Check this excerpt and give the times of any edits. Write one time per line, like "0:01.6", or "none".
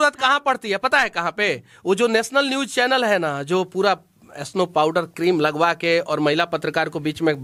none